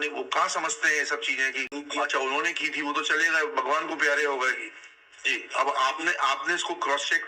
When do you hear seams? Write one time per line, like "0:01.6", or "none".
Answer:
0:01.7